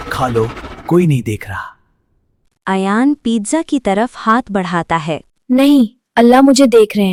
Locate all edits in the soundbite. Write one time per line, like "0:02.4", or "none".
none